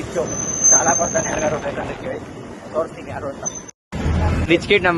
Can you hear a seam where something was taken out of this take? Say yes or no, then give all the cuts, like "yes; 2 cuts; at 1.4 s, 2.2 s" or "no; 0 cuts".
no; 0 cuts